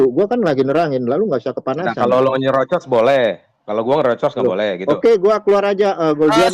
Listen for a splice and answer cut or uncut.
uncut